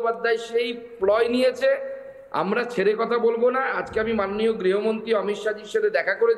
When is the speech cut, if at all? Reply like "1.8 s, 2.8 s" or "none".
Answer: none